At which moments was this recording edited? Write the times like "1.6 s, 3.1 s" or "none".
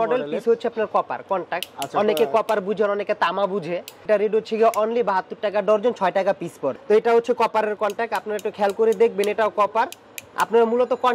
4.0 s, 6.7 s